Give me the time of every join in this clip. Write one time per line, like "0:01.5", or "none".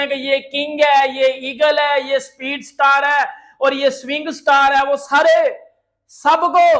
none